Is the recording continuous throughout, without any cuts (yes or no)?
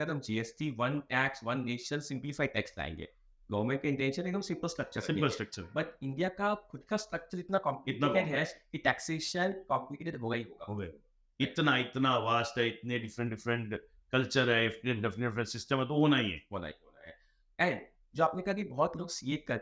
yes